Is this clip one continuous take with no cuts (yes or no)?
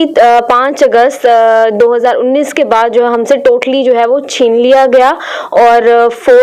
yes